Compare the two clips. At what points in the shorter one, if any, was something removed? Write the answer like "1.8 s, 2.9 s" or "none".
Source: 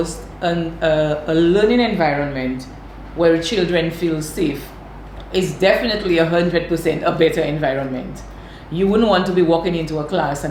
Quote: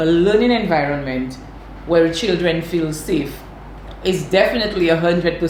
none